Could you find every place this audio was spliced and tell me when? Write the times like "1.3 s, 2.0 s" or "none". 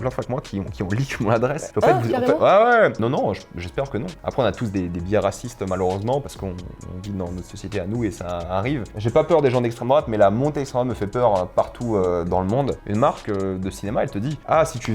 3.0 s, 9.0 s, 12.8 s